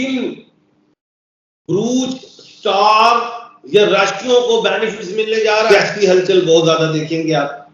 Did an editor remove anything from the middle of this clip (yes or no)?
yes